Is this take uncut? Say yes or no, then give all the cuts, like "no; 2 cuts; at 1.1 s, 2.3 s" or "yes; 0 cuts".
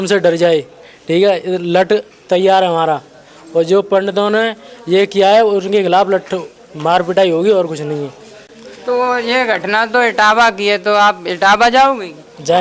yes; 0 cuts